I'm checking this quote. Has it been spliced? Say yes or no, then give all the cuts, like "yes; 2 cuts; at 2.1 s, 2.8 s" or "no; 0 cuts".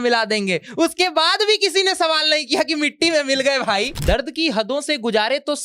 yes; 1 cut; at 3.9 s